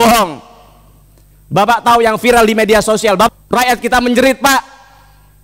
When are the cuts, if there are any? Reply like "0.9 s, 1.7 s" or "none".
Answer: 3.3 s